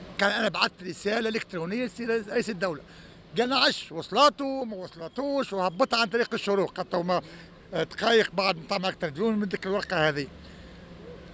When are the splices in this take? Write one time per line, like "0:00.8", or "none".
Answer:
none